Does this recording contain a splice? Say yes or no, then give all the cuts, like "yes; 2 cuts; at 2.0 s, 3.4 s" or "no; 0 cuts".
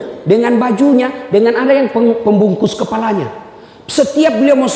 no; 0 cuts